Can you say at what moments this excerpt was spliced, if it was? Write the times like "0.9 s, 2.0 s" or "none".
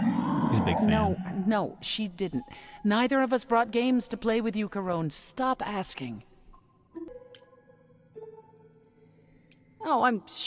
7.1 s